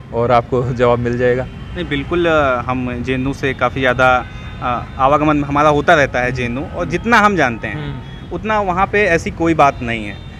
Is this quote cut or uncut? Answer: uncut